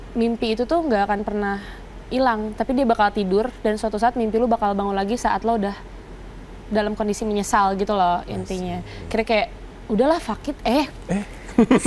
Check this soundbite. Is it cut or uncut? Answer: uncut